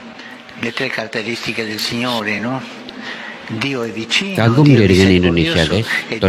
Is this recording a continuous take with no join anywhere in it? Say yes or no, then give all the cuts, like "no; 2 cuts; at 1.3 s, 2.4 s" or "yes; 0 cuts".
yes; 0 cuts